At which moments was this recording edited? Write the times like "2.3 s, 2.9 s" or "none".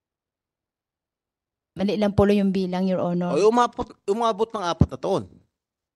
none